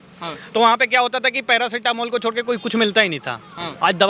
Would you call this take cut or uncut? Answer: uncut